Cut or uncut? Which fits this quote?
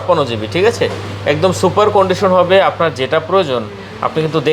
uncut